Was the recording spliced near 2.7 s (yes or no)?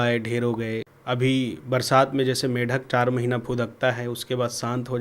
no